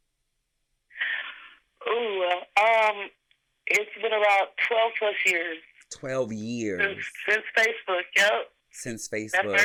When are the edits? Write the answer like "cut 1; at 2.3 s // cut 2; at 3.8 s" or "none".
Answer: none